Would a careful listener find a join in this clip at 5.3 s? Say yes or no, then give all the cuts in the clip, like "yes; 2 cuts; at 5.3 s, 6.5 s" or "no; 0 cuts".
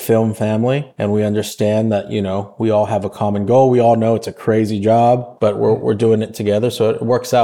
yes; 1 cut; at 5.3 s